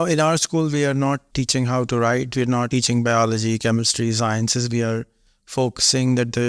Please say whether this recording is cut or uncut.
cut